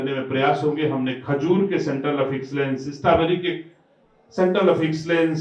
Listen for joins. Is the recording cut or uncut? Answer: uncut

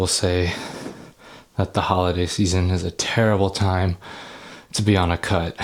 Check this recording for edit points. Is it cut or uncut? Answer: uncut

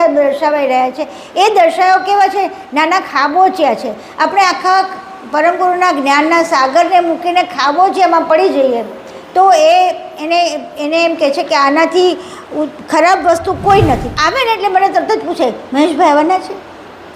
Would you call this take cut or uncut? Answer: cut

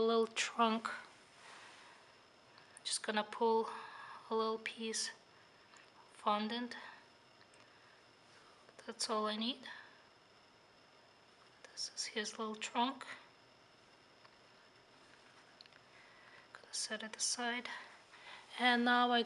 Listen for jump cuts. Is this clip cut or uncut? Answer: uncut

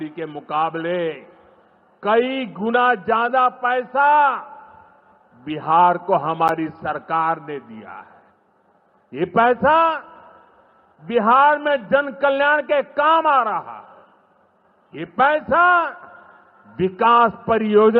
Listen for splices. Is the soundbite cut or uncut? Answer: uncut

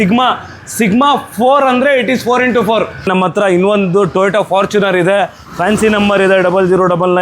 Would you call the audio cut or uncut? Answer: cut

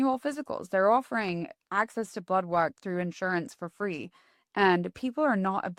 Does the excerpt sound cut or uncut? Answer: uncut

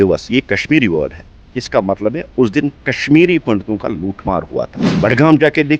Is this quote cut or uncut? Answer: cut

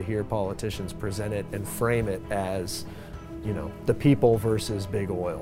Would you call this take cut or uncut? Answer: uncut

